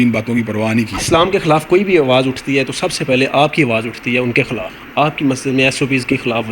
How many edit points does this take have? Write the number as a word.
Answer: two